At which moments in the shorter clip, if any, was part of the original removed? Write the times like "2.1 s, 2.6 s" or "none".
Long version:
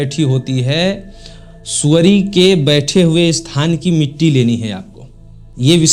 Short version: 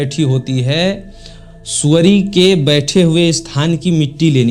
none